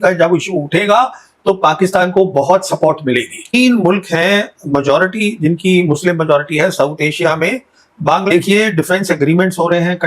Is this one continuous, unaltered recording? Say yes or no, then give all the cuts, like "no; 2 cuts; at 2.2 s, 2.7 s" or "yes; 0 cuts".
no; 2 cuts; at 3.5 s, 8.2 s